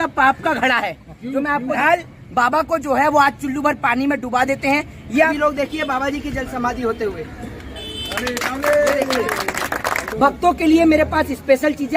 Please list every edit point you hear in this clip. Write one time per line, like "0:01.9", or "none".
0:01.8
0:05.3
0:10.0

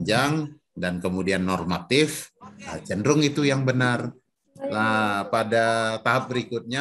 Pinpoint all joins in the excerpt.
none

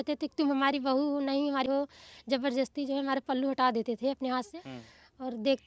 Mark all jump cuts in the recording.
0:01.7
0:04.6

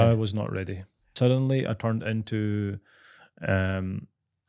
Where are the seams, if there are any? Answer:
0:01.1

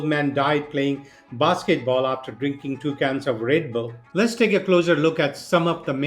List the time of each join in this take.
0:04.0

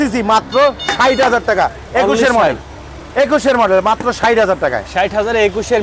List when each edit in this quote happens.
none

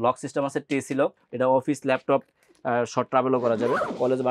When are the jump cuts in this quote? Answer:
0:01.2

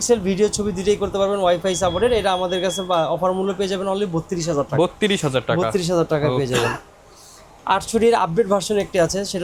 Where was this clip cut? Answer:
none

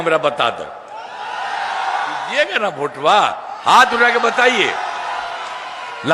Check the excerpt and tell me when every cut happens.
0:02.2

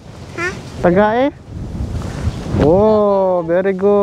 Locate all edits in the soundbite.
none

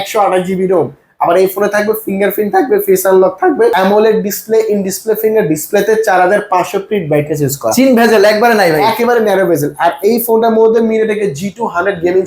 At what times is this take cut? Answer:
0:03.7

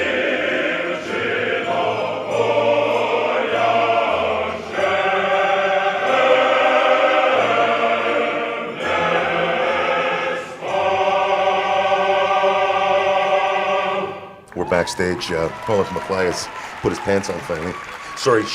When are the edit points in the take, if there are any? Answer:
0:05.2

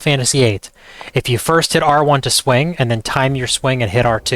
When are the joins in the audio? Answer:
none

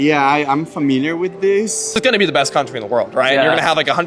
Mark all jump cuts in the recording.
0:02.0

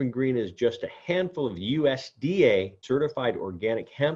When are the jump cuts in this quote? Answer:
0:02.8

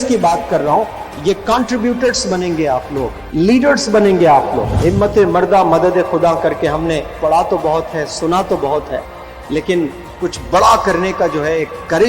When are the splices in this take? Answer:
0:03.2
0:04.7

